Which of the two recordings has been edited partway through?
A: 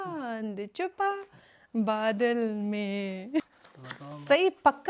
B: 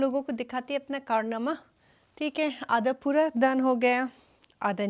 A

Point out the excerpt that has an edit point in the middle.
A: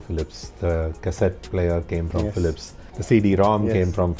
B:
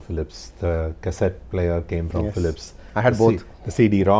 A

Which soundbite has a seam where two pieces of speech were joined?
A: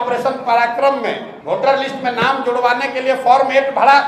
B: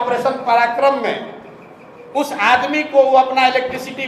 A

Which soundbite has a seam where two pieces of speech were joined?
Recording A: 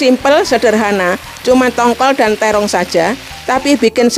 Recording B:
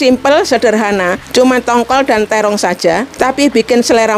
B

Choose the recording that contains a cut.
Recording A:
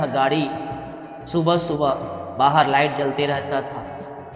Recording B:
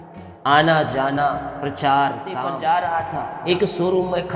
B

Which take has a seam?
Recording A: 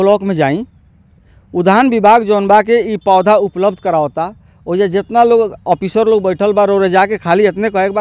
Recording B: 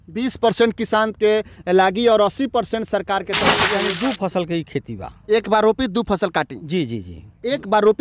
B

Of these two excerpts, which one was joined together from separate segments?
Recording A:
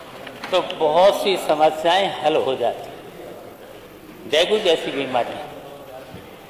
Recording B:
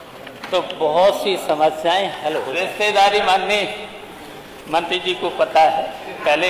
B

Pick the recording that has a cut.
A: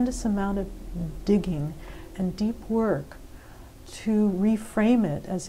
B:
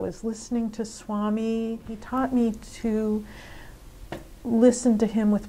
B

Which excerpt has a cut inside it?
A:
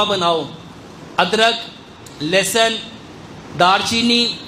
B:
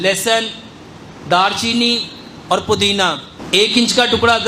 B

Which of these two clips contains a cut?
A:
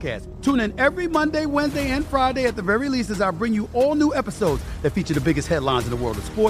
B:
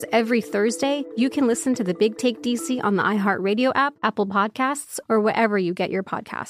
B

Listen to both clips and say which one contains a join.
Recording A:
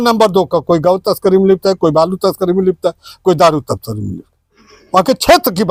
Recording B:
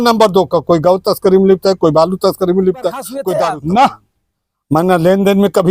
B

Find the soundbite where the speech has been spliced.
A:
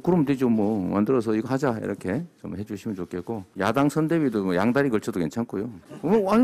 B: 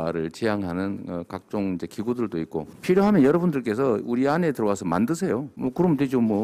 A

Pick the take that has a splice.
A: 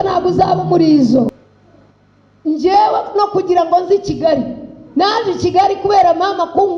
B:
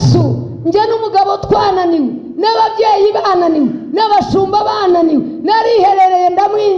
A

